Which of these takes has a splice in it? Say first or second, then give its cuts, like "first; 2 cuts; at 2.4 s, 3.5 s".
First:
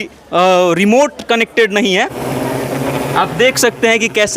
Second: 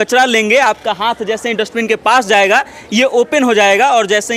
first; 1 cut; at 2.2 s